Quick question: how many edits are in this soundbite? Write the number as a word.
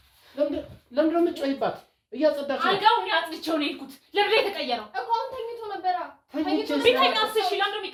zero